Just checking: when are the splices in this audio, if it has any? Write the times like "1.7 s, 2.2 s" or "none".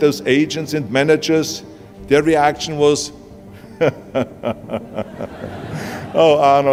none